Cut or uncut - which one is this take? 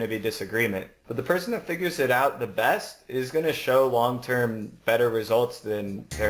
cut